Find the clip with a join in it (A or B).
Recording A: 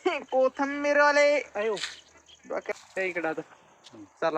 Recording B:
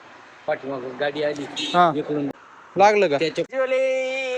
B